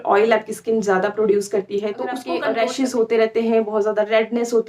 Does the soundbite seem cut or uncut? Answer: cut